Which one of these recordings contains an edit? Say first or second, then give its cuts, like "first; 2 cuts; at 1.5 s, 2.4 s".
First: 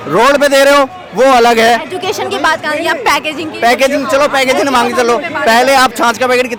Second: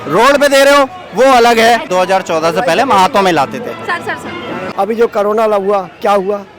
second; 2 cuts; at 1.9 s, 4.6 s